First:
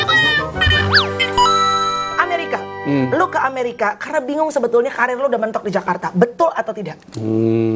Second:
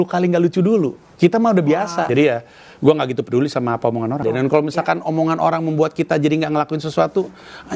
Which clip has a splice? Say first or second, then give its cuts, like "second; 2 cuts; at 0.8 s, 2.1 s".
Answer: second; 2 cuts; at 2.1 s, 4.2 s